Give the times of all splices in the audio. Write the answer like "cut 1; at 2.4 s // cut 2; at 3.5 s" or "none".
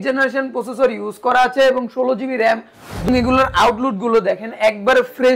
cut 1; at 3.1 s